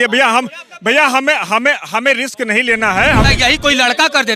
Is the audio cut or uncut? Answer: cut